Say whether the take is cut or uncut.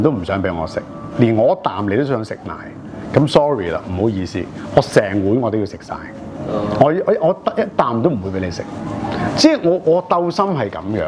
uncut